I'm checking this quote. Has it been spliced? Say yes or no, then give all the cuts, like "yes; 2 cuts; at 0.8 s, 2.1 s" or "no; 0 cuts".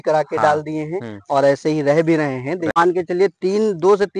yes; 1 cut; at 2.8 s